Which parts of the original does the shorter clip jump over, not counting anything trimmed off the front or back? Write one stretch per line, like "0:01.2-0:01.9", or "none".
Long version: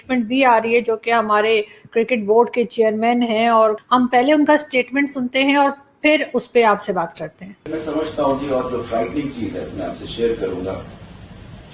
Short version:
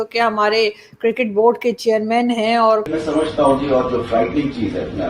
0:03.8-0:07.7

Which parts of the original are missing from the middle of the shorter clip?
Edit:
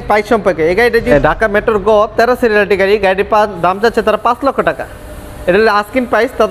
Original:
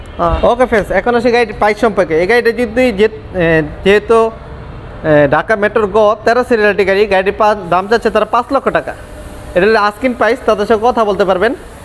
0:02.6-0:05.2

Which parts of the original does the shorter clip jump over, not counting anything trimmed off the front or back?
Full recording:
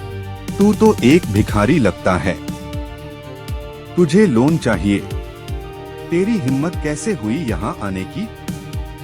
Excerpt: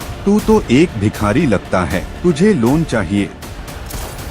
0:02.4-0:03.8

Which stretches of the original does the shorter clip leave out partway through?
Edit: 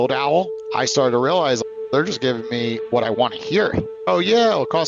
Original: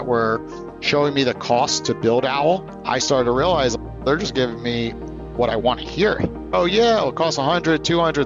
0:04.9-0:05.3

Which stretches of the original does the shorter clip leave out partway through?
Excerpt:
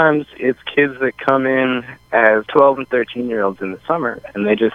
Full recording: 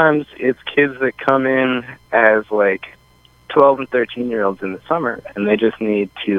0:02.5-0:03.5

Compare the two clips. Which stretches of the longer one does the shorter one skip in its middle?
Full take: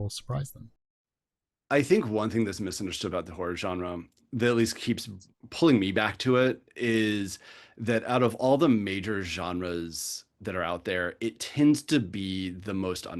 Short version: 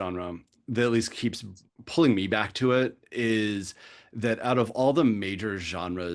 none

